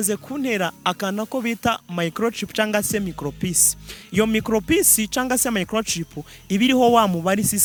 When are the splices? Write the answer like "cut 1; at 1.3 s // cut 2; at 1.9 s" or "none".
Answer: none

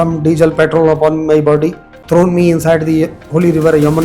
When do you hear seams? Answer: cut 1; at 2.0 s

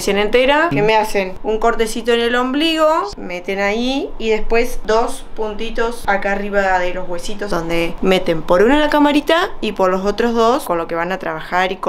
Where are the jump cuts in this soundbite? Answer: cut 1; at 0.9 s // cut 2; at 3.2 s // cut 3; at 4.8 s // cut 4; at 6.0 s // cut 5; at 7.6 s // cut 6; at 10.6 s

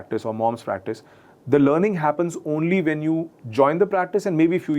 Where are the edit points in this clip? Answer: none

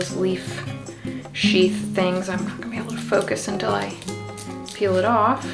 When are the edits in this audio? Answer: none

